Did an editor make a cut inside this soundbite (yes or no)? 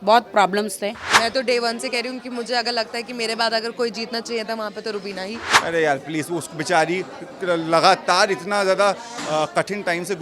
yes